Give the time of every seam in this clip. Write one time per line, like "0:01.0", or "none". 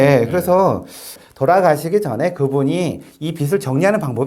none